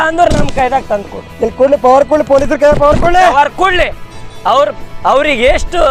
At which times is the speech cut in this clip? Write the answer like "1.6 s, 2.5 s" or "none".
none